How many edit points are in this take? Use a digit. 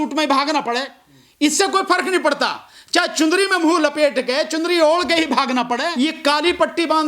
1